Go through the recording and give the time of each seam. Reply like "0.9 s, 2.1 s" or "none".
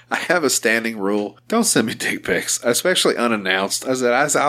1.4 s